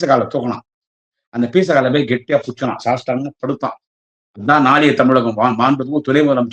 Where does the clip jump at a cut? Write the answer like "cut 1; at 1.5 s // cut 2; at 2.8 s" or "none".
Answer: none